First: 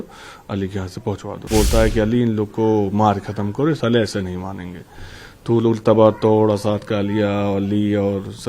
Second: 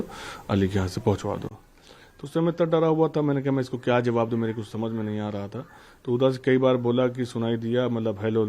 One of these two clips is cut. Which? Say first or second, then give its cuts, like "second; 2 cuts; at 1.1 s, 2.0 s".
first; 1 cut; at 1.5 s